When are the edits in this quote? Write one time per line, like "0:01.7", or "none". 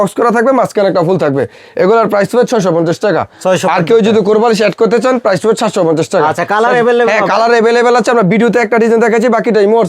none